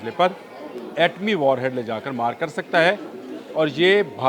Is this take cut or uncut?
uncut